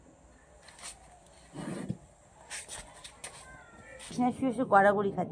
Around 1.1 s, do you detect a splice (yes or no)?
no